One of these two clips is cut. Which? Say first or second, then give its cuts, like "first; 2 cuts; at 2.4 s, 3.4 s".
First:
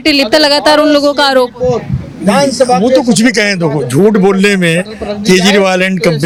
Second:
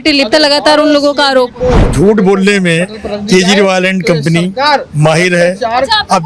second; 1 cut; at 1.9 s